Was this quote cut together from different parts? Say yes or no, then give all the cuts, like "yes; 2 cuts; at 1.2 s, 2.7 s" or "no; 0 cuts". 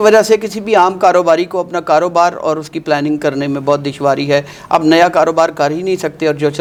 no; 0 cuts